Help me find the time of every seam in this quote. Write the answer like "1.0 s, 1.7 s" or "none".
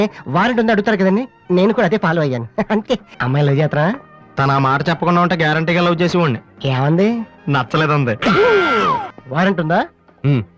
3.1 s, 9.1 s